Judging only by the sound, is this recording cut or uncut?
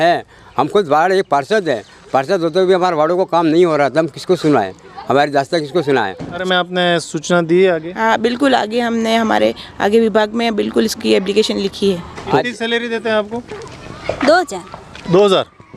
cut